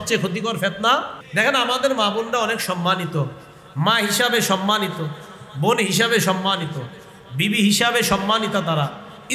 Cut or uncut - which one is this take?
cut